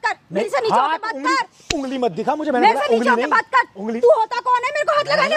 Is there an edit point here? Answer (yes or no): no